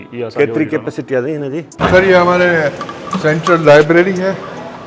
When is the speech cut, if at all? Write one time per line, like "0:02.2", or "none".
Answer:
0:01.7